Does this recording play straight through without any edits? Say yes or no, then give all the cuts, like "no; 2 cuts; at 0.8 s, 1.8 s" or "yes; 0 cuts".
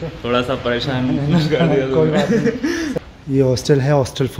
no; 1 cut; at 2.9 s